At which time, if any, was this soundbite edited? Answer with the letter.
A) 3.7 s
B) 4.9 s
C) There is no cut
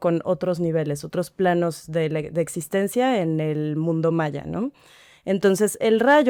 C